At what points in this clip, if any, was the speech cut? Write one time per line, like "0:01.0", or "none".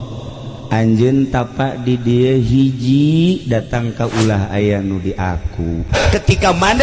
0:05.9